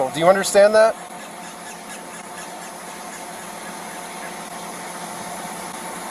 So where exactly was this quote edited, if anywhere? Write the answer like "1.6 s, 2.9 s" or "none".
none